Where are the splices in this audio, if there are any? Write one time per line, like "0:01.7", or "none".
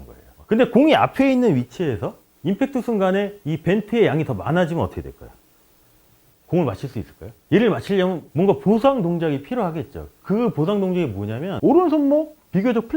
0:11.5